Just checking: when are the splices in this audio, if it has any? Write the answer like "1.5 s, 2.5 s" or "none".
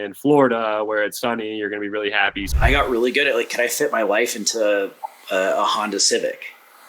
2.4 s